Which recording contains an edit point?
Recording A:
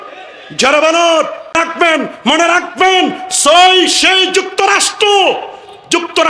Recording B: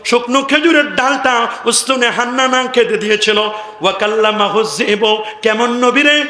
A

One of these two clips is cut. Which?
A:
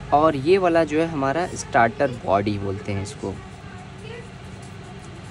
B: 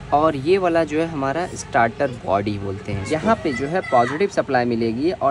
B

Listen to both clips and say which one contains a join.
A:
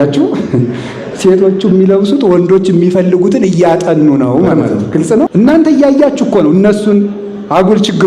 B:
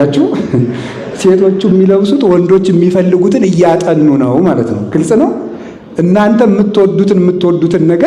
A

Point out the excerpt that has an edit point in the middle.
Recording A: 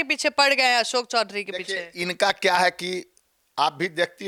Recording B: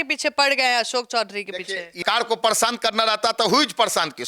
B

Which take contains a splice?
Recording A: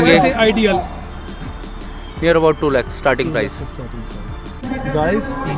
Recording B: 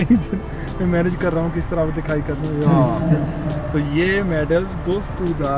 A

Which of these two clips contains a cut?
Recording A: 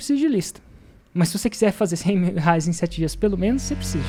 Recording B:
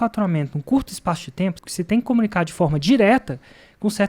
B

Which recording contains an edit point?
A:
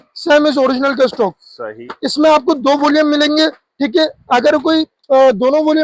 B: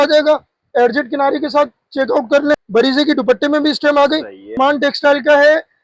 B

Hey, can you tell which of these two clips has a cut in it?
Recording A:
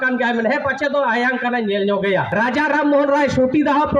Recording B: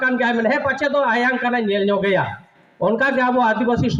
A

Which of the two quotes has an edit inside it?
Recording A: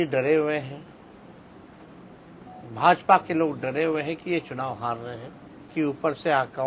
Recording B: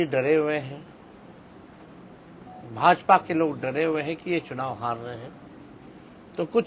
A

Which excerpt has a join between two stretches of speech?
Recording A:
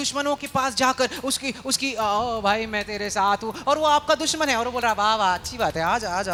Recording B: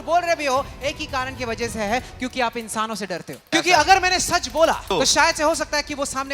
B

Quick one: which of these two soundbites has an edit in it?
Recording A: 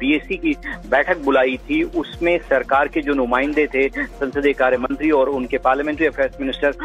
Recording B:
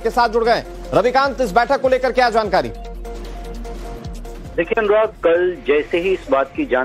B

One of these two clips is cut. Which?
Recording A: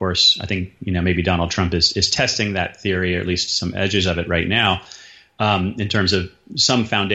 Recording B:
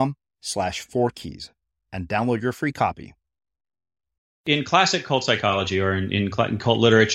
B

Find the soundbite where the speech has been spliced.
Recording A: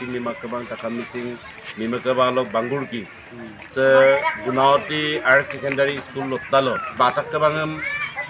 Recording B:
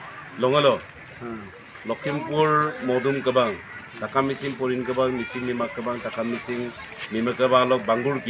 A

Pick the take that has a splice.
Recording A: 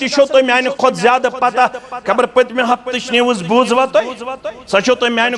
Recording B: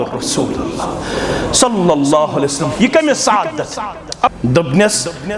B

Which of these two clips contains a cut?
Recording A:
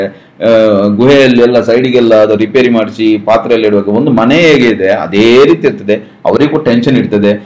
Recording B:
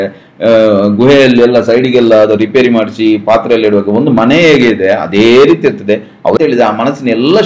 B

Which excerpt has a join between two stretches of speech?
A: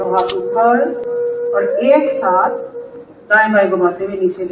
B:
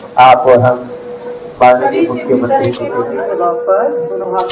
B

